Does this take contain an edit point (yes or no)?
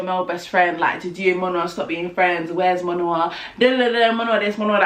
no